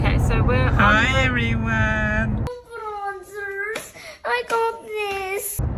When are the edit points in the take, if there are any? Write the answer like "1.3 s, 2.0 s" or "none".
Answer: none